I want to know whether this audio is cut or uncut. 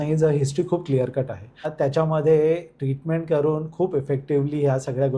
cut